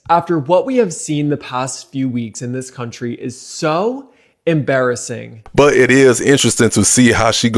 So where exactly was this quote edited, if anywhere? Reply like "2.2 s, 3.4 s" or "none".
5.4 s